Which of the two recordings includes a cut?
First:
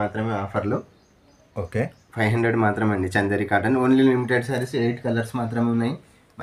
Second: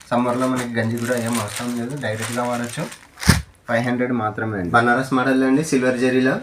second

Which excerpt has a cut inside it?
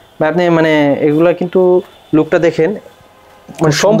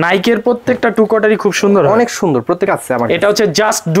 second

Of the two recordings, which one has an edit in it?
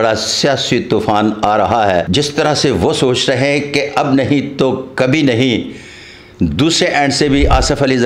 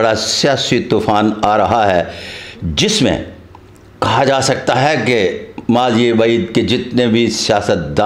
first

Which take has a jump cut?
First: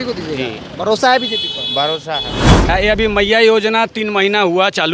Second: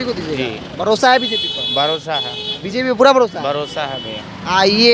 first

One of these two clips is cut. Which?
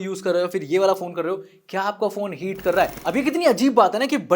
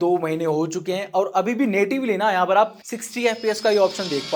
first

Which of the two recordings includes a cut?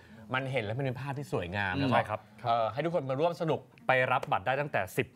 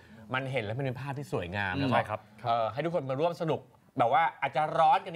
first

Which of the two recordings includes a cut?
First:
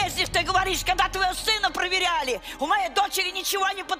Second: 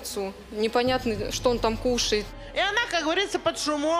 second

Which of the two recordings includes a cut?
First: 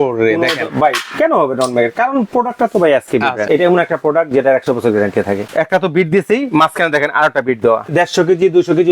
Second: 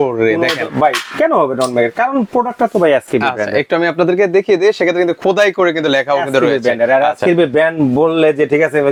first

